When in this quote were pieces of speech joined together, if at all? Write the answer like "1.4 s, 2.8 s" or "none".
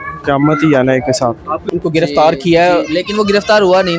1.7 s